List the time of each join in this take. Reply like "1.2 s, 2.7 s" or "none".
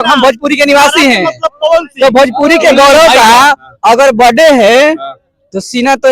none